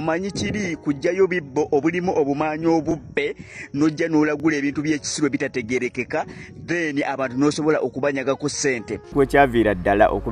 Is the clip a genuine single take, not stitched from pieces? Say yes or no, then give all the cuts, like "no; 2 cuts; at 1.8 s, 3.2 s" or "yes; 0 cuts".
no; 1 cut; at 9.1 s